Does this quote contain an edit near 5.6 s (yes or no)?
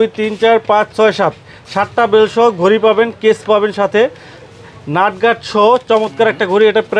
no